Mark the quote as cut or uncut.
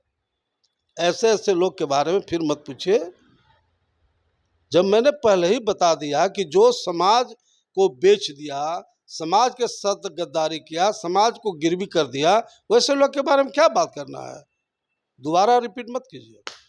uncut